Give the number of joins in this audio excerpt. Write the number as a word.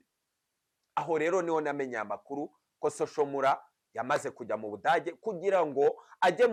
zero